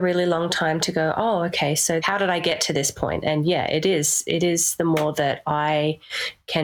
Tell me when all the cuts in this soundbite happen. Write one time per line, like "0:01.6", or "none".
0:02.0